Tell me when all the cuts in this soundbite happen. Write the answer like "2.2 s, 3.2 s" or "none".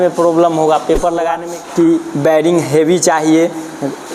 1.4 s